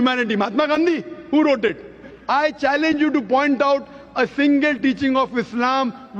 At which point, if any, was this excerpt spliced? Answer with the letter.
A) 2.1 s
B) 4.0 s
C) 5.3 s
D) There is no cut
A